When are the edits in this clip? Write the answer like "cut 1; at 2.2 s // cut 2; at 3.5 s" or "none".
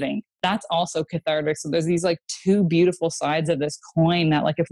none